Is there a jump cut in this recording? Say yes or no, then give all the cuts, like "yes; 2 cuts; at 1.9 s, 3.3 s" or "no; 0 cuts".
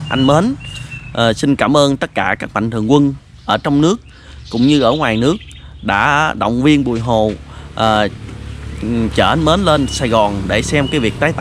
no; 0 cuts